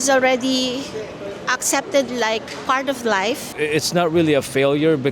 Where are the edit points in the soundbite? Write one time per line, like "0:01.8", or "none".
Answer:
0:03.5

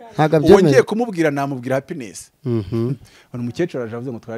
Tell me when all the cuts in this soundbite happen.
0:02.2

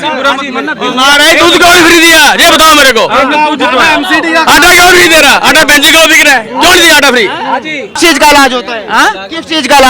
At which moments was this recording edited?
0:08.0

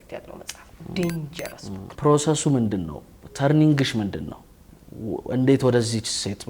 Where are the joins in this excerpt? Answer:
0:01.9

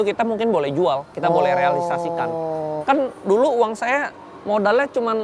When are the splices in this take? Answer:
0:02.8

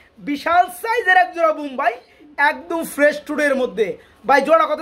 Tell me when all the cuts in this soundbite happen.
none

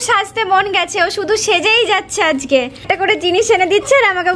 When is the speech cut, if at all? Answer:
0:02.8

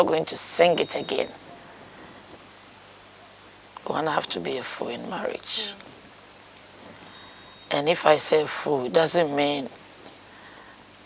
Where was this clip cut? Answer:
0:03.7

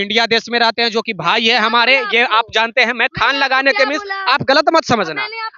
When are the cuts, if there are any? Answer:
none

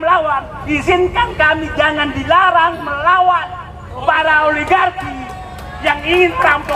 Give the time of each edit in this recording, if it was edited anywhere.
none

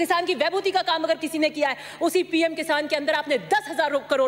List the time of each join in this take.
none

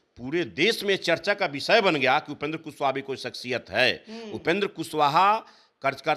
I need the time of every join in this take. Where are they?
none

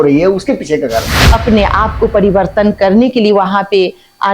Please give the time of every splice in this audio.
0:01.2

